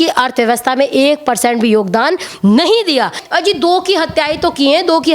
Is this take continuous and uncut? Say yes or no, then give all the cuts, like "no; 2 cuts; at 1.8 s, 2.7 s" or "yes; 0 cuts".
no; 1 cut; at 3.2 s